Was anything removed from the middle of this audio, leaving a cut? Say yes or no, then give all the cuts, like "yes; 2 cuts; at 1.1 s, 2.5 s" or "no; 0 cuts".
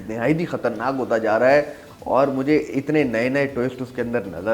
no; 0 cuts